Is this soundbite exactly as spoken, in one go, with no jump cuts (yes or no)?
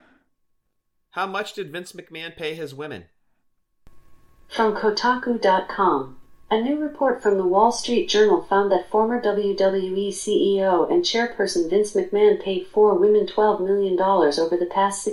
yes